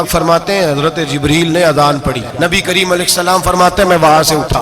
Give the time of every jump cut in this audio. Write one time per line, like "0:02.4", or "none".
0:02.3